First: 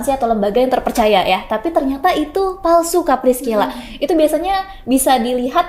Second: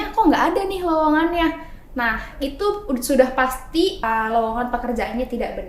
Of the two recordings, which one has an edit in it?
second; 1 cut; at 4.0 s

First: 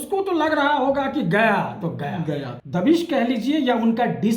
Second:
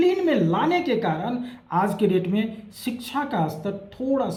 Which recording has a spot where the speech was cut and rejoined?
first; 1 cut; at 2.5 s

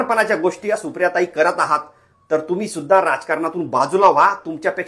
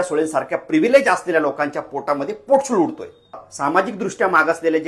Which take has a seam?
second; 1 cut; at 3.5 s

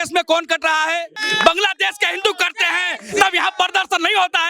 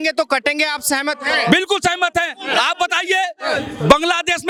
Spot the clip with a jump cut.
first; 1 cut; at 1.2 s

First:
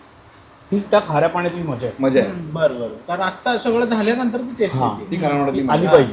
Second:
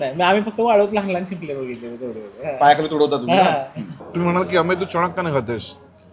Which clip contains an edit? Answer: second; 1 cut; at 4.0 s

